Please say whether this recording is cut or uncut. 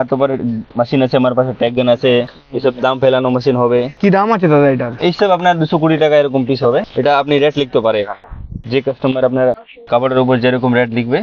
uncut